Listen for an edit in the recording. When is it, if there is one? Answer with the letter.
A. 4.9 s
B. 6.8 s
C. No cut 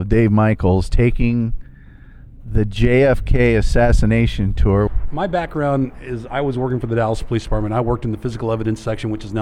A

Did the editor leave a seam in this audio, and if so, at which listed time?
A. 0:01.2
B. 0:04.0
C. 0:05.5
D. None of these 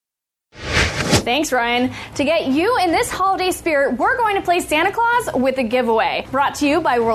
A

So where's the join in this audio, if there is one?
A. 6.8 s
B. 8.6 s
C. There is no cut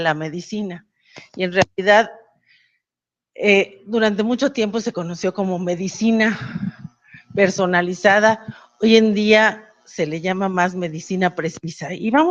C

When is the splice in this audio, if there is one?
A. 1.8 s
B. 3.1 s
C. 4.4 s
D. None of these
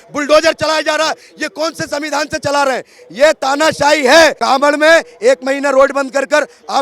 C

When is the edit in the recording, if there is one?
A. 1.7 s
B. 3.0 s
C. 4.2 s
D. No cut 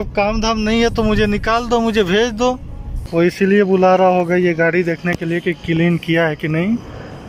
B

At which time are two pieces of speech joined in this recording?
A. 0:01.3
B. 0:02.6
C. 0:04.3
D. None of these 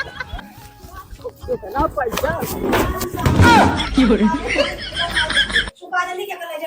B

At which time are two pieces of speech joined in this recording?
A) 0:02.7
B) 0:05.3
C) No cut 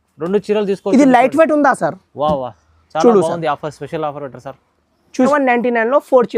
B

